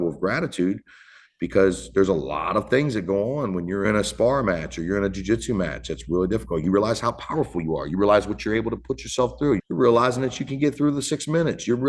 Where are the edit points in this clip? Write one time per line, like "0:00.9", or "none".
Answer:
0:03.9
0:06.6
0:09.6